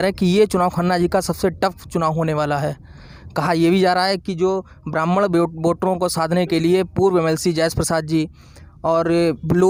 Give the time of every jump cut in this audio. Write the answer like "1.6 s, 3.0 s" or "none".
none